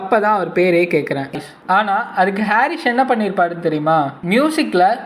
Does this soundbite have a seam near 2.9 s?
no; 1 cut; at 1.3 s

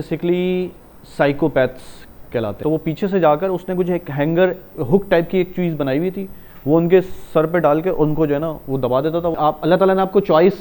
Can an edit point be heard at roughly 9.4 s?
yes; 2 cuts; at 2.5 s, 9.4 s

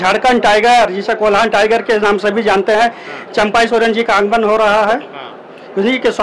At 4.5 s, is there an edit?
no; 0 cuts

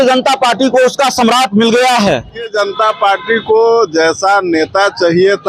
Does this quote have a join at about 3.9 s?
no; 1 cut; at 2.5 s

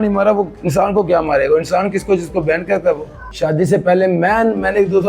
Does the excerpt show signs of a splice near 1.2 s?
no; 1 cut; at 3.3 s

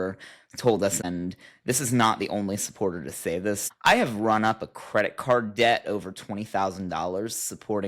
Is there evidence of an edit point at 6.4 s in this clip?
no; 2 cuts; at 1.0 s, 3.8 s

